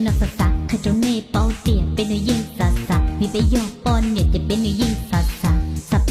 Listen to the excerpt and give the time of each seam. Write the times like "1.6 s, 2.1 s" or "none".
none